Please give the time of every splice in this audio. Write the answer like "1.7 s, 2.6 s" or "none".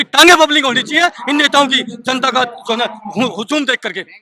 none